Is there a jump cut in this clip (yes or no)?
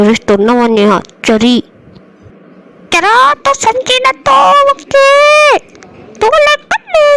no